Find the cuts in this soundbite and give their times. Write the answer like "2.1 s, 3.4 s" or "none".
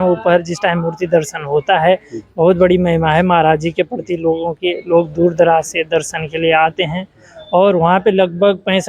none